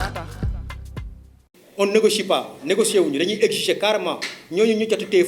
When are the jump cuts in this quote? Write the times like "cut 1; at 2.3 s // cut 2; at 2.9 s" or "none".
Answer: cut 1; at 1.3 s